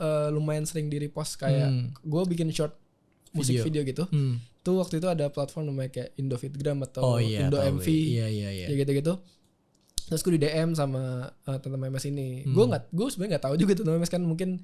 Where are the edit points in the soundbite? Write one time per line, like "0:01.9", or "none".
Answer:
none